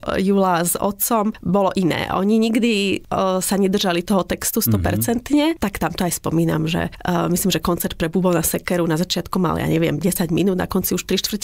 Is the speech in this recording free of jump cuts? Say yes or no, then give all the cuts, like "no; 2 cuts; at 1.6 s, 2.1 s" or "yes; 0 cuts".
yes; 0 cuts